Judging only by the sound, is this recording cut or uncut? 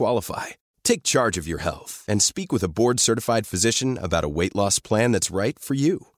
uncut